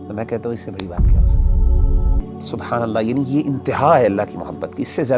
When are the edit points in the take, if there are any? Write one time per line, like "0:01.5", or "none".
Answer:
0:02.2